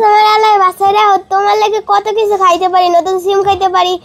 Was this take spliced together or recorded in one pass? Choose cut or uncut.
uncut